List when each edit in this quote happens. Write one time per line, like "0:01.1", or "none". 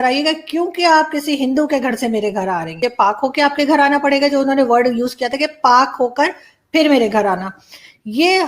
0:02.8